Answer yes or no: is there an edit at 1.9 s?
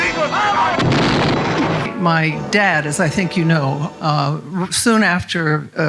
yes